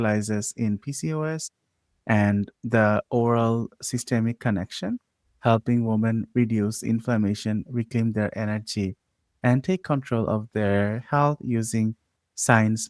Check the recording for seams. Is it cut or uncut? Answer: uncut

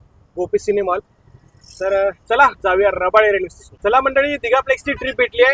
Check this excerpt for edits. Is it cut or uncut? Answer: cut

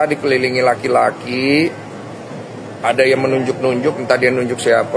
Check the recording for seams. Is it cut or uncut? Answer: uncut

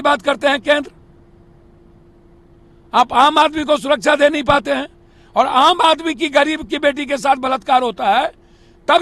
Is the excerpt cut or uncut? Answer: uncut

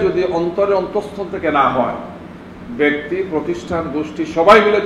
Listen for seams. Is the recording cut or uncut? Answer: uncut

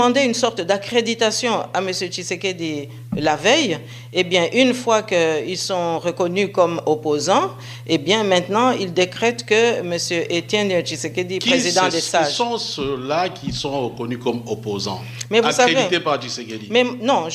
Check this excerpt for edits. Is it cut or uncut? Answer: cut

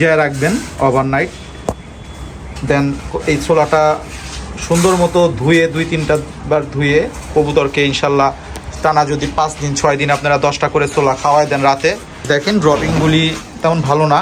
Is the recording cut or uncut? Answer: cut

